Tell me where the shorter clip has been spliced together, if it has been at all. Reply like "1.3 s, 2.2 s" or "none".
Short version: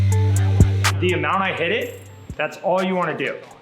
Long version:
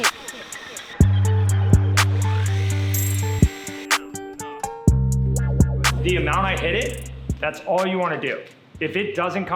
1.0 s